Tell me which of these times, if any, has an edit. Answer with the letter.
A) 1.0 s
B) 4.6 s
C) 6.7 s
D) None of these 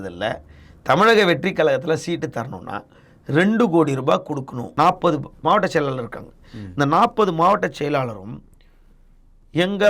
B